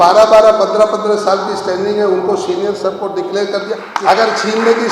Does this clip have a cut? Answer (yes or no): yes